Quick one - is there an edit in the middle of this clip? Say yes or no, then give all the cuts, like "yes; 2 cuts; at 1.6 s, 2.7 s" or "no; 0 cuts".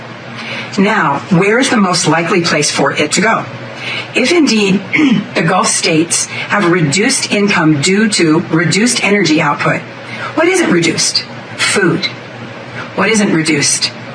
no; 0 cuts